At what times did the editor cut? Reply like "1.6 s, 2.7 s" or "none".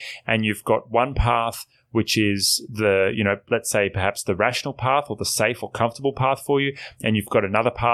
none

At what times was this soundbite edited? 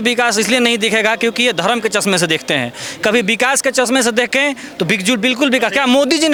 none

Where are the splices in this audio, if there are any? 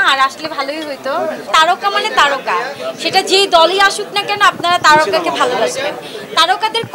1.4 s

